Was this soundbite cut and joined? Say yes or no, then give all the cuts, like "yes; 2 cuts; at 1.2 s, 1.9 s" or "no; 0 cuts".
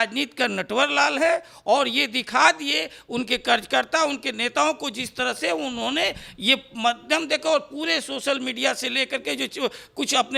no; 0 cuts